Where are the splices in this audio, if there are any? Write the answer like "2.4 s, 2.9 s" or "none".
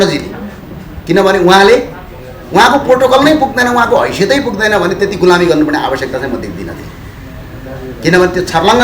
none